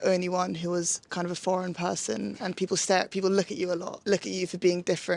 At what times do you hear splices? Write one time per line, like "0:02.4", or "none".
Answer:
0:03.9